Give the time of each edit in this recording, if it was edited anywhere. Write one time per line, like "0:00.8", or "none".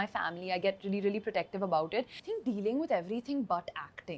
0:02.1